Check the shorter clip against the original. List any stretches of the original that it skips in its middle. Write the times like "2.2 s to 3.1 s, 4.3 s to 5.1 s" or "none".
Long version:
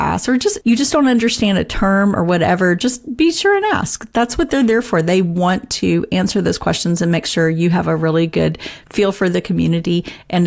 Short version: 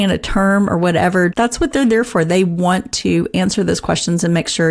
2.8 s to 4.1 s